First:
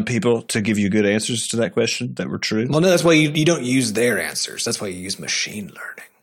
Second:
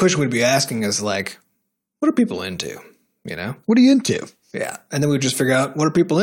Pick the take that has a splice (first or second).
first